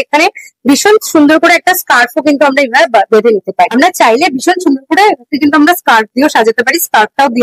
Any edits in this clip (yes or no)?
no